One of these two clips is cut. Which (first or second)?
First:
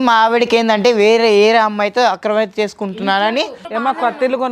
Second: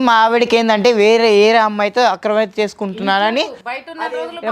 first